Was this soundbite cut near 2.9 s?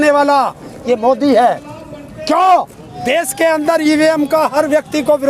yes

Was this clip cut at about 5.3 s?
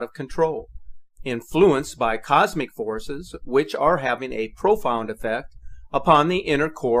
no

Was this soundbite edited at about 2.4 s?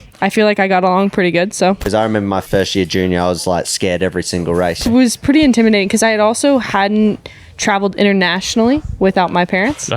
yes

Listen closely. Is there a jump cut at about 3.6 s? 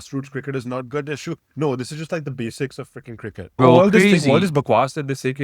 yes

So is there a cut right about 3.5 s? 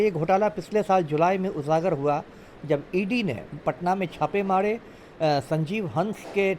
yes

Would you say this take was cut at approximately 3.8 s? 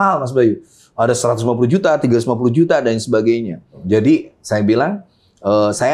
yes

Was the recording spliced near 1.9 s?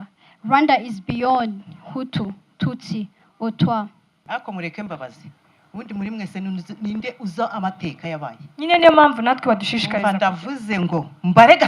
no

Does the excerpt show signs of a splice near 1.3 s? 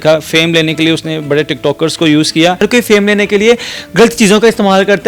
no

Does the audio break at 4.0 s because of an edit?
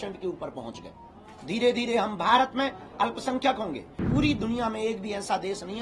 yes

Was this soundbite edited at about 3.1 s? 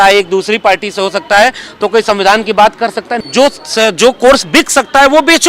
yes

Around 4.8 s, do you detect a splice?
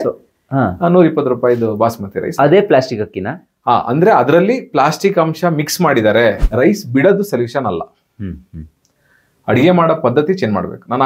no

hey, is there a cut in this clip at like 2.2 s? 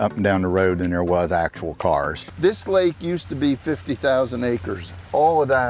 yes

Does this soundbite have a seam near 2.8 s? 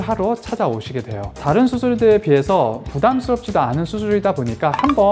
no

